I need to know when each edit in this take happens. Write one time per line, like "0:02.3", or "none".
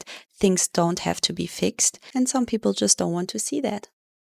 0:01.9